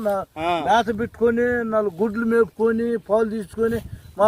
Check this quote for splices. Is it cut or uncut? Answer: uncut